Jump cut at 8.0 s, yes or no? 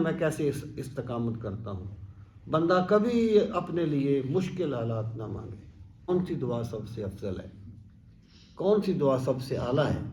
no